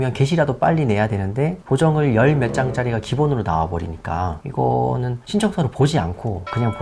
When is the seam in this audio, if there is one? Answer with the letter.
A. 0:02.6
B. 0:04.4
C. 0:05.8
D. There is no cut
B